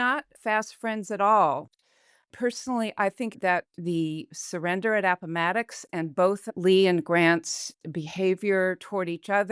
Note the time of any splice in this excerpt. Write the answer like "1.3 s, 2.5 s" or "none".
none